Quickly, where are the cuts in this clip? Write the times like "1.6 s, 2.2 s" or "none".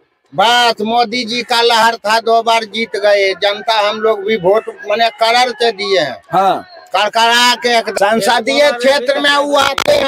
7.9 s

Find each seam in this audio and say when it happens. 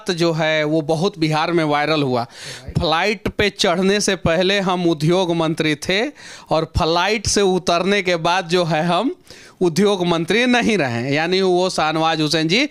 none

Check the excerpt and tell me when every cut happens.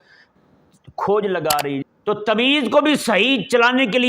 1.9 s

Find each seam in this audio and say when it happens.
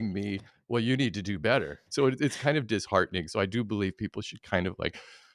1.8 s

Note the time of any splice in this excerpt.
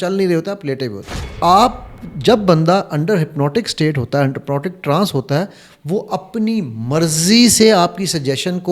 1.2 s

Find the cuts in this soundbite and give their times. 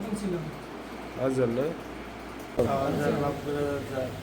2.6 s

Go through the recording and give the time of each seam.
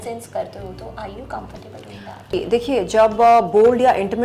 2.3 s

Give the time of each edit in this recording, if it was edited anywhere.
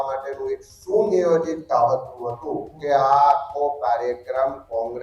2.7 s

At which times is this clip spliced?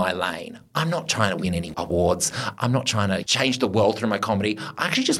3.2 s

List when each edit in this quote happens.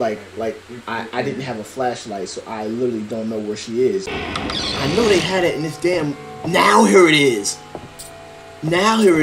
4.1 s

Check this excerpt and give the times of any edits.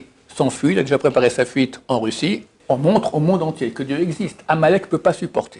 2.5 s

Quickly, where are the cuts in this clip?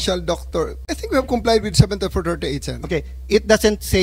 1.0 s

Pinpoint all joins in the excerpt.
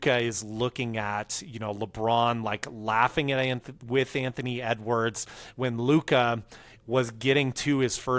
none

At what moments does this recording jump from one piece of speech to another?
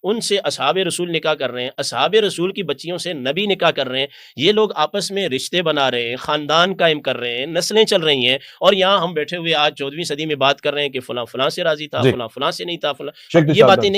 none

